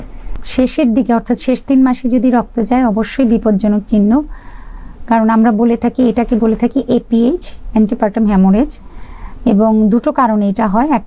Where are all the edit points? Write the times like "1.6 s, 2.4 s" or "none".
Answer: none